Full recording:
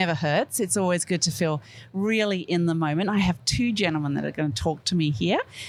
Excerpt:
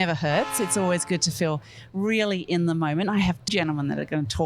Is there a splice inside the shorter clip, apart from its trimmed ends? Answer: yes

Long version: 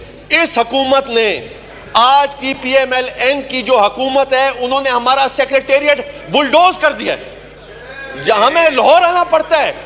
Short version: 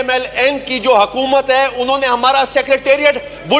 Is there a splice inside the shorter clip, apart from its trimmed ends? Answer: no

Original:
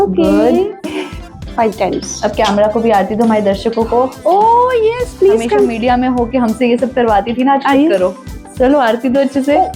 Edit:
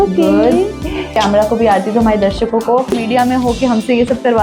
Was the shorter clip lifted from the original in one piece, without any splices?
no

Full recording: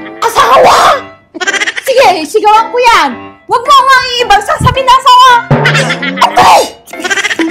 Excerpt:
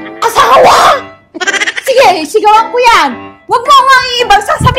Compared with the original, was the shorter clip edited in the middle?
no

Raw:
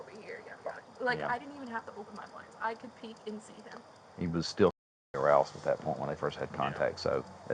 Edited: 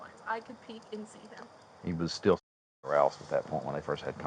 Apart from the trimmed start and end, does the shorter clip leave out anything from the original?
no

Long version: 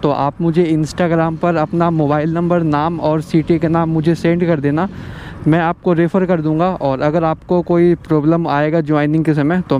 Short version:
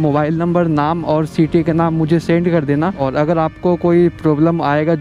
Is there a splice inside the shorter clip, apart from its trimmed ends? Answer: yes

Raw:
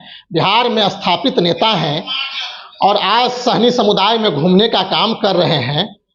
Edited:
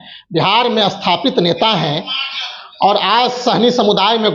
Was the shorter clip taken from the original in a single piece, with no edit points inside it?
yes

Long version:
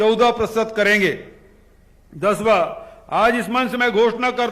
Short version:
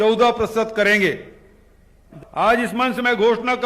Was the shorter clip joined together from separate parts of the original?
yes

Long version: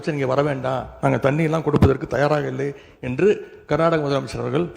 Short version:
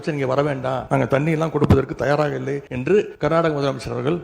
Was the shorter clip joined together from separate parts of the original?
yes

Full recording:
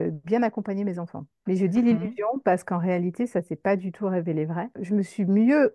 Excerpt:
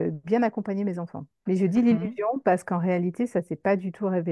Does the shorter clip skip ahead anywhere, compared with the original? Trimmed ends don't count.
no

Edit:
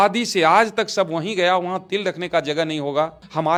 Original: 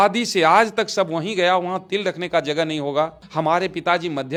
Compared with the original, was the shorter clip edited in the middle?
no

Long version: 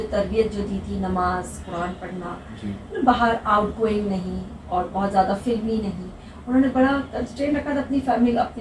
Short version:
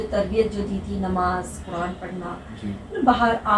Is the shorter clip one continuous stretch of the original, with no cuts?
yes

